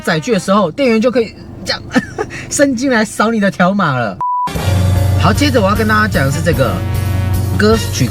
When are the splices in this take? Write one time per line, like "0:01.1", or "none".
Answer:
0:04.2